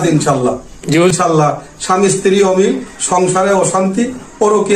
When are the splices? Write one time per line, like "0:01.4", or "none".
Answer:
0:01.1

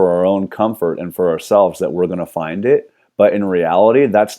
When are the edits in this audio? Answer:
0:03.0

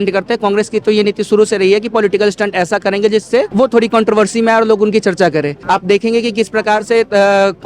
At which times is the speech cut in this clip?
0:03.5
0:05.6

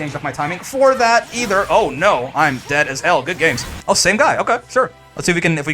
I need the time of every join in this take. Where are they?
0:03.7

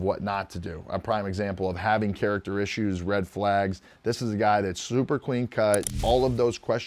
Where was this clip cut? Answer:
0:03.9
0:05.9

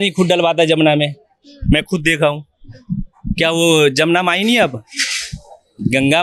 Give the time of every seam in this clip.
none

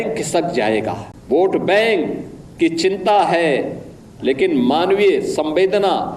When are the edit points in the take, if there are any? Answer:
0:01.1

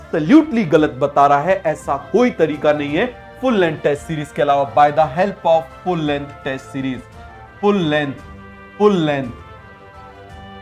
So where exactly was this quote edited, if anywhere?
none

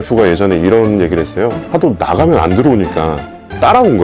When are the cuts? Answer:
0:01.6

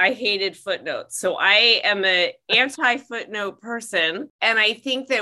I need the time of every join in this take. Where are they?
0:04.3

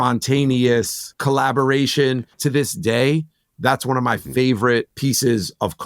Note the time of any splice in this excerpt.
0:01.0
0:02.4
0:04.9

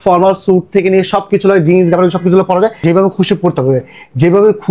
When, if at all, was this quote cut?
0:02.8

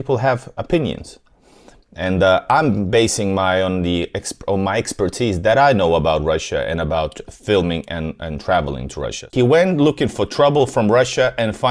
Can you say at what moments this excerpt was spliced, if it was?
0:09.3

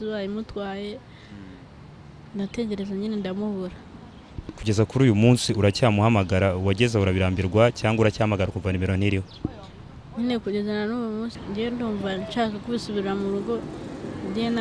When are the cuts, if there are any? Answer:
0:11.4

